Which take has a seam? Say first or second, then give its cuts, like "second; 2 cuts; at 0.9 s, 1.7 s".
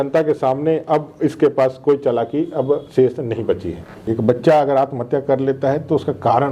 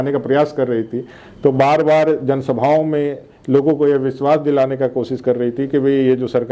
first; 1 cut; at 4.0 s